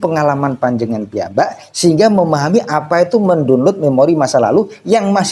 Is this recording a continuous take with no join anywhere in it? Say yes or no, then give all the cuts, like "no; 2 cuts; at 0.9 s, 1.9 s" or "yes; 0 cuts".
yes; 0 cuts